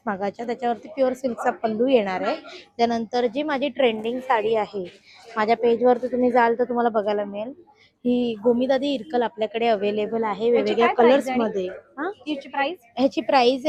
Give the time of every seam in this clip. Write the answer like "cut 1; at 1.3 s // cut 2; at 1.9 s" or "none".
none